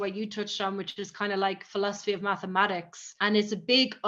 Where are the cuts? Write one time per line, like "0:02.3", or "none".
none